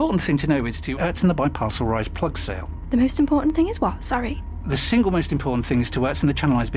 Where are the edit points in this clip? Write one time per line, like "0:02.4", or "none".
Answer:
none